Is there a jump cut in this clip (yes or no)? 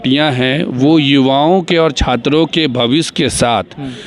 no